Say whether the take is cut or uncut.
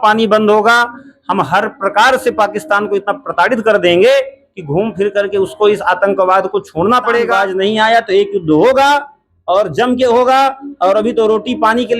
cut